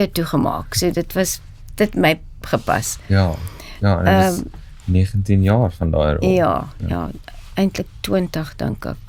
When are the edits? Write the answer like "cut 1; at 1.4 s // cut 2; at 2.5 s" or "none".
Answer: none